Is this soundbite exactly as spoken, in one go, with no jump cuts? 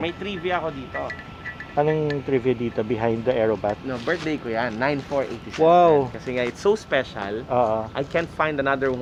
yes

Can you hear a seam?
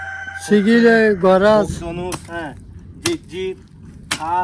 no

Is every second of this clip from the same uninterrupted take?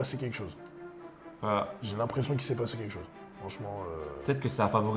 yes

